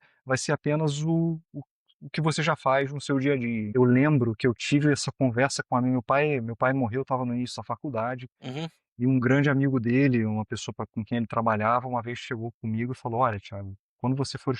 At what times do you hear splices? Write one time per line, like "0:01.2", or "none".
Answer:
0:03.7